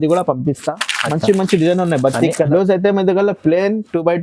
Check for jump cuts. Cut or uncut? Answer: cut